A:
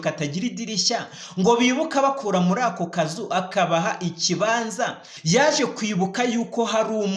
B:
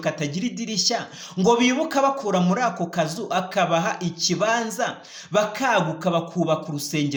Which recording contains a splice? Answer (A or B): A